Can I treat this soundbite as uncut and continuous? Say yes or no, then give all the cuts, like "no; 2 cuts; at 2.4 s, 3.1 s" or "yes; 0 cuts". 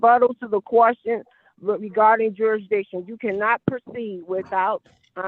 yes; 0 cuts